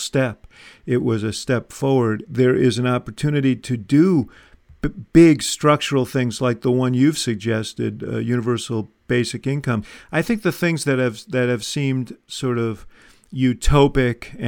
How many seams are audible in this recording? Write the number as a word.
two